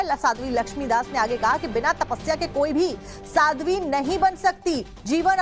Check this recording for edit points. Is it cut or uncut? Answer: cut